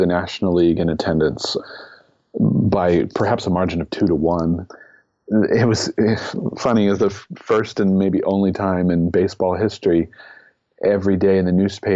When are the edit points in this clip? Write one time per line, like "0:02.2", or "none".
0:01.6
0:04.8